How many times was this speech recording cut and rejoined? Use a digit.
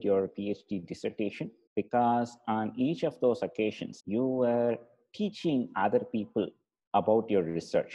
2